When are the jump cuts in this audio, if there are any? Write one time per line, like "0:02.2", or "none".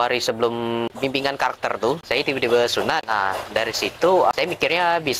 0:00.9
0:02.0
0:03.0